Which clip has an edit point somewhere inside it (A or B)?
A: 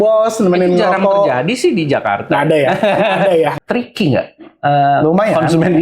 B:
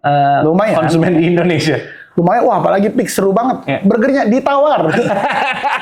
A